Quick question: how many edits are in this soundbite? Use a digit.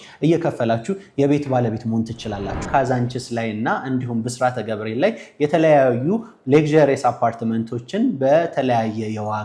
1